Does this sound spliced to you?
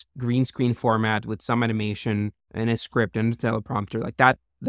yes; 1 cut; at 2.4 s

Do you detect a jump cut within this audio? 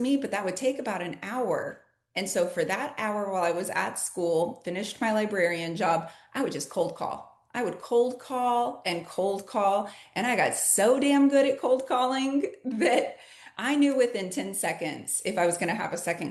no; 0 cuts

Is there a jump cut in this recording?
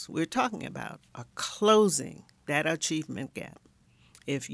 no; 0 cuts

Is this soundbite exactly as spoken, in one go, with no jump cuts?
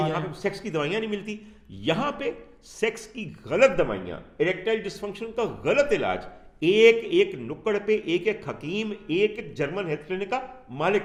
yes; 0 cuts

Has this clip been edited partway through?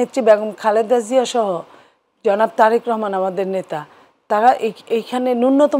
no; 0 cuts

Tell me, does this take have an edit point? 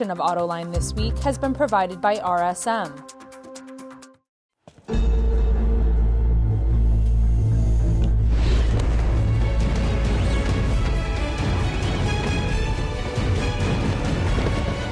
yes; 2 cuts; at 2.9 s, 4.0 s

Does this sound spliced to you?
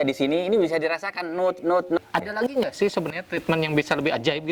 yes; 1 cut; at 2.0 s

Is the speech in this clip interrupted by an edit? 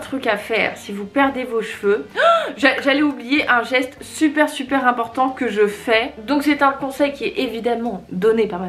yes; 2 cuts; at 2.1 s, 6.2 s

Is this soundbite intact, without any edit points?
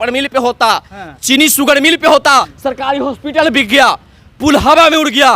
no; 1 cut; at 2.5 s

